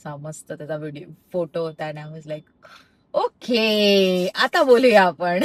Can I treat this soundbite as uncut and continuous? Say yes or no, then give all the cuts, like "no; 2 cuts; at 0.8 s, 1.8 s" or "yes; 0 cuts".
yes; 0 cuts